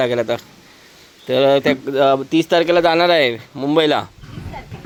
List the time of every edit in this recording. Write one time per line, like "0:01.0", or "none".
none